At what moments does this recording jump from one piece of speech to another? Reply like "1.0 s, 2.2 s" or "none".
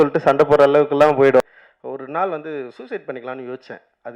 1.4 s

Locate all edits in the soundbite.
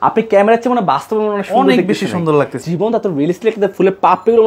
2.6 s

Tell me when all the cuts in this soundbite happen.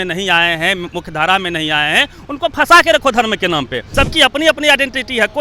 3.8 s

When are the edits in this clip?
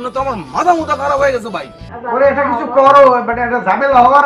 1.9 s

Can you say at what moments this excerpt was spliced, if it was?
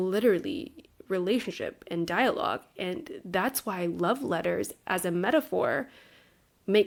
none

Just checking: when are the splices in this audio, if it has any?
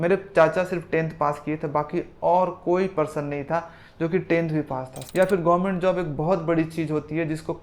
5.0 s

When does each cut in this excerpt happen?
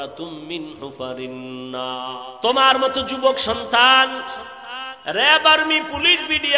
1.9 s

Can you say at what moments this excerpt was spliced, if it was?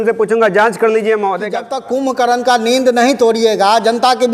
1.7 s

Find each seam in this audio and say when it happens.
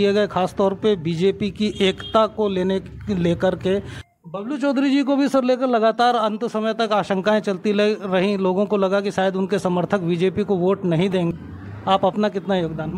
4.0 s, 11.3 s

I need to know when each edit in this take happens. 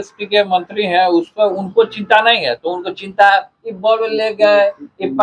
none

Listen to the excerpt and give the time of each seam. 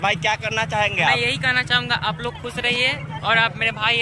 none

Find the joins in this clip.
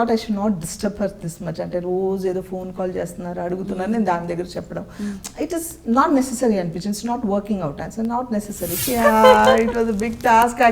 8.8 s

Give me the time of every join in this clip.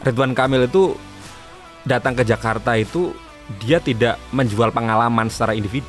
none

